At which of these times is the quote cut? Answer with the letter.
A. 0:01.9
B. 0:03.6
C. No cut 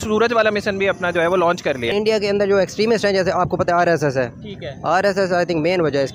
A